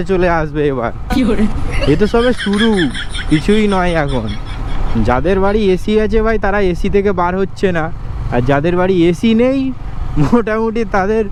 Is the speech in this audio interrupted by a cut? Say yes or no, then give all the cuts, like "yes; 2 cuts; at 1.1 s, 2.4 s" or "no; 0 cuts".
no; 0 cuts